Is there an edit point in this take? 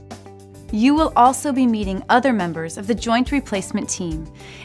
yes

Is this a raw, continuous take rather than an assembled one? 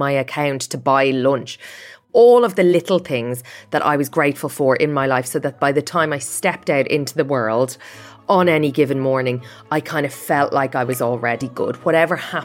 no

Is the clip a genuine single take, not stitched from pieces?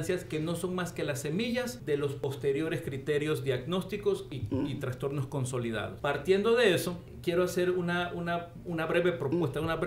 no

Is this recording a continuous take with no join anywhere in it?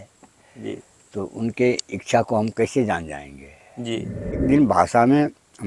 no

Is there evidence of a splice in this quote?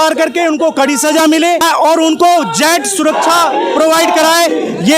yes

